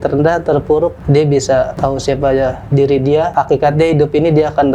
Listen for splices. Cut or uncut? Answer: cut